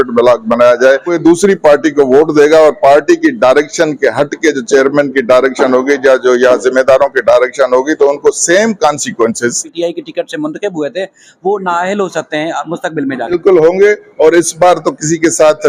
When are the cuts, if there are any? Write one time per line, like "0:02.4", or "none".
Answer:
0:01.2
0:09.7
0:13.3